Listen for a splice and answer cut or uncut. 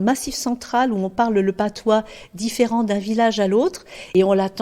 uncut